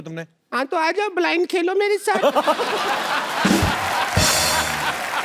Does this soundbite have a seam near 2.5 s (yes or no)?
no